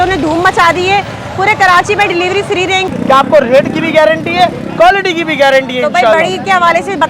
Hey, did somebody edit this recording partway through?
yes; 1 cut; at 2.9 s

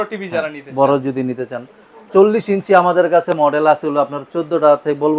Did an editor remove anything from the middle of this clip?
no; 0 cuts

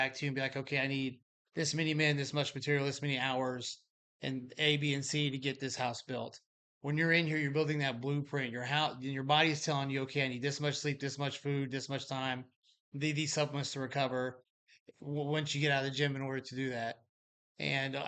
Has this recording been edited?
no; 0 cuts

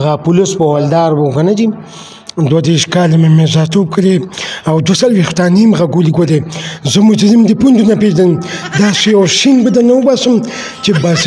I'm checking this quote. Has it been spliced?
no; 0 cuts

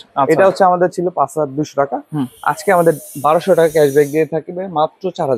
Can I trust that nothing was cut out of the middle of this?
yes; 0 cuts

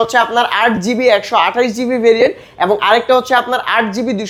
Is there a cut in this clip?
no; 0 cuts

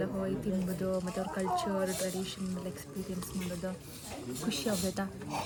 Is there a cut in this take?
no; 0 cuts

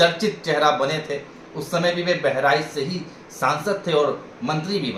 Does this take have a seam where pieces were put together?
no; 0 cuts

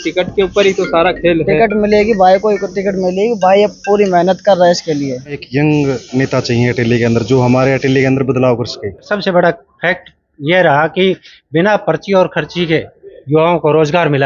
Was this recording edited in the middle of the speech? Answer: yes; 2 cuts; at 5.4 s, 9.1 s

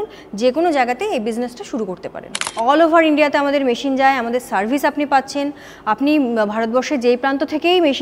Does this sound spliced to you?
yes; 1 cut; at 2.5 s

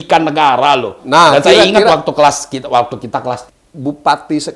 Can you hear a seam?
yes; 1 cut; at 3.5 s

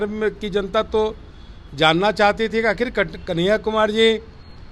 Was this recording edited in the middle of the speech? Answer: no; 0 cuts

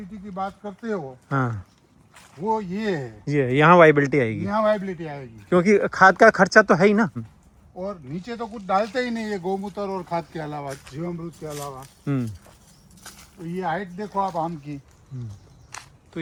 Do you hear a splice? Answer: no; 0 cuts

